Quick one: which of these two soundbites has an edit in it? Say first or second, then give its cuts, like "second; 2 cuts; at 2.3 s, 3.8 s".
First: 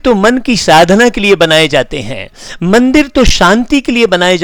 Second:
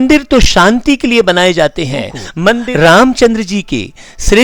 second; 1 cut; at 2.6 s